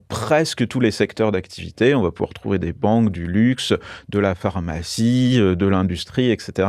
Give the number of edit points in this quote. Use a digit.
0